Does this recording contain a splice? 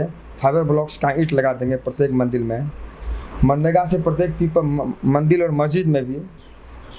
no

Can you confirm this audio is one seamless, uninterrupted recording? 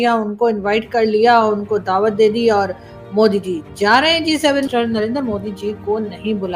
no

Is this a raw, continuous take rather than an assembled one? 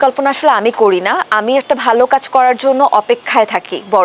yes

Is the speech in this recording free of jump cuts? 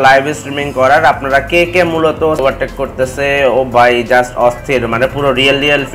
no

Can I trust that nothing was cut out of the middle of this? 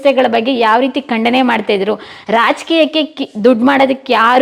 yes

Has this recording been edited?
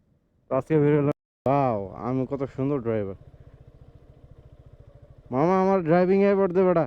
yes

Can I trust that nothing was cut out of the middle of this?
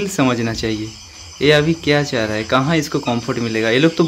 yes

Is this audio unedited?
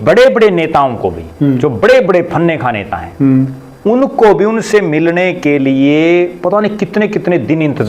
yes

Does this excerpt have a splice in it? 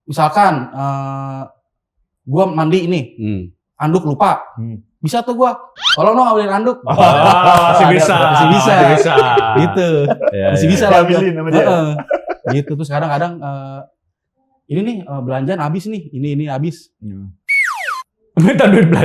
no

